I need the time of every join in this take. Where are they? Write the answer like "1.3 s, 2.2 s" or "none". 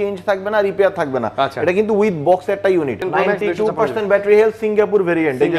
3.0 s